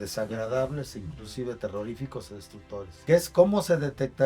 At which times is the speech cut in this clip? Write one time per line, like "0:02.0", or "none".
0:02.9